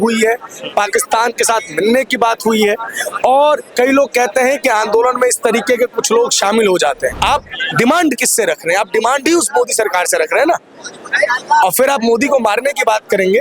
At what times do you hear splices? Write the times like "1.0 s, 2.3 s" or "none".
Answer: 7.2 s